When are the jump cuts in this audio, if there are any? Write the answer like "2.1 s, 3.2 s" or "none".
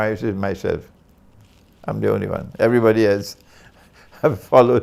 none